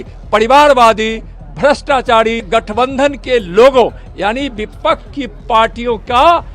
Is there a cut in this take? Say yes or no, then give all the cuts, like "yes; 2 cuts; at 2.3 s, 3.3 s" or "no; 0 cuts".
yes; 1 cut; at 2.5 s